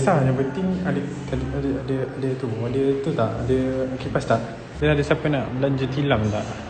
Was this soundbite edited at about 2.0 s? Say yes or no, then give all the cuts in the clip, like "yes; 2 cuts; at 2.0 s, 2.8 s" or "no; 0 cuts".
no; 1 cut; at 4.7 s